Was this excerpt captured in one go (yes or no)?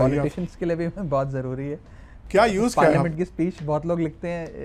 yes